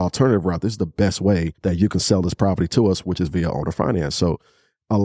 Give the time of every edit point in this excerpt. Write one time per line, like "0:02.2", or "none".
0:01.5